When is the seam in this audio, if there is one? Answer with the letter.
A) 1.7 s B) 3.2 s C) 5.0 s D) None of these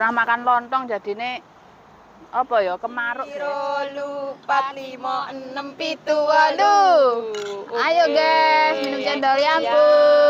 B